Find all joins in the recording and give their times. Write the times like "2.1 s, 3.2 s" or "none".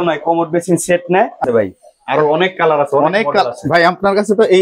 1.4 s